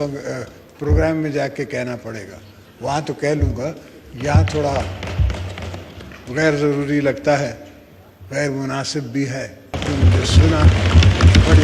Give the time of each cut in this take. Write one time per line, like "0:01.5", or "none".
0:09.8